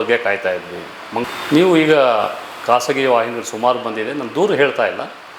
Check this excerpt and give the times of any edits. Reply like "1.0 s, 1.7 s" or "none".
1.2 s